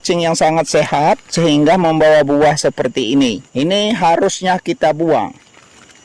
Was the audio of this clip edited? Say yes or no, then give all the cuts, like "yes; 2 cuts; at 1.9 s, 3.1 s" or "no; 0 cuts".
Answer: yes; 1 cut; at 3.4 s